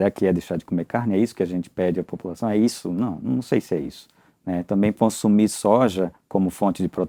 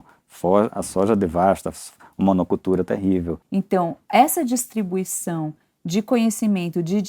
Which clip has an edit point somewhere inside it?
second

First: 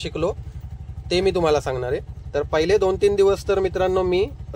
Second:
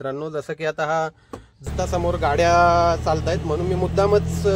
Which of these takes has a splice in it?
second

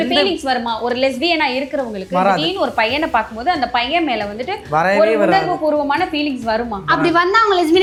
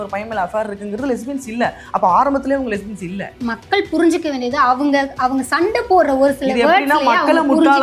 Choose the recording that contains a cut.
second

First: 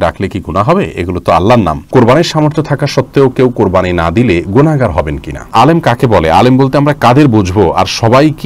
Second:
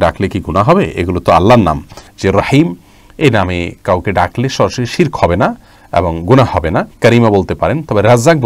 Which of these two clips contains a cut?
first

